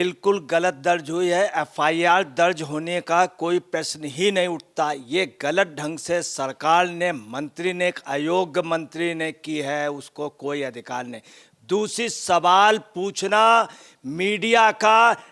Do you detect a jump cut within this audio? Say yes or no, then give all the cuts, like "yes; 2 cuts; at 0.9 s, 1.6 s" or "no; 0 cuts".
no; 0 cuts